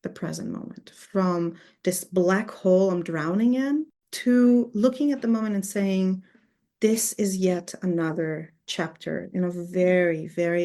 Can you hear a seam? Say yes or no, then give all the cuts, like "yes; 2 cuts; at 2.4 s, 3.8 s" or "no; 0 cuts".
yes; 1 cut; at 4.0 s